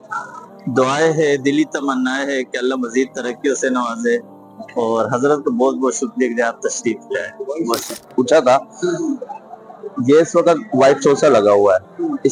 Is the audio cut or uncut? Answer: uncut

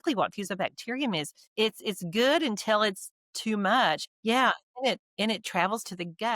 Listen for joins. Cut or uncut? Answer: cut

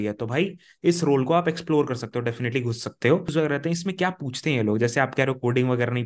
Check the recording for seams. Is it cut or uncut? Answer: cut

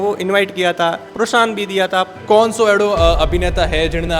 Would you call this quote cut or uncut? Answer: cut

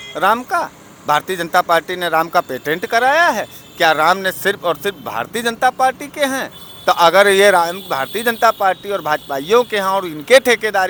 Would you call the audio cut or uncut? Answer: uncut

